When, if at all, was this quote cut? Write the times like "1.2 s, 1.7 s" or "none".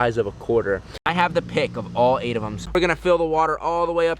1.3 s, 2.8 s